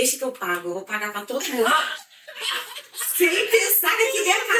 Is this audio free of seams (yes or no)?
yes